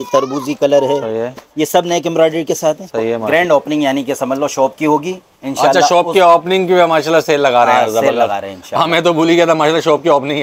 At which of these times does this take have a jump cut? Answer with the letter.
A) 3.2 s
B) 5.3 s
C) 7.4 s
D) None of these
A